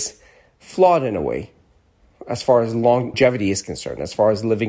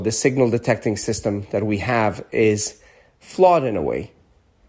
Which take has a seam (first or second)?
first